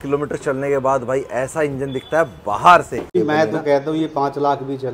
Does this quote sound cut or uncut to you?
cut